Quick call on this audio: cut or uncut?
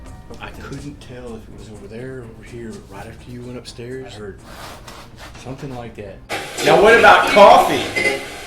cut